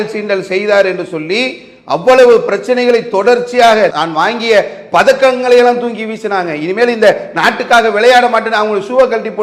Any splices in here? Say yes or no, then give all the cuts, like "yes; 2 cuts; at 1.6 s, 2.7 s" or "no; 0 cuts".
no; 0 cuts